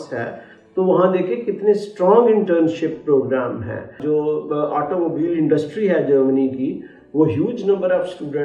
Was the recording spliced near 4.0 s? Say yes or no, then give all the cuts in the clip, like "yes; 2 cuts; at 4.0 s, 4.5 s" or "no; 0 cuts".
yes; 1 cut; at 4.0 s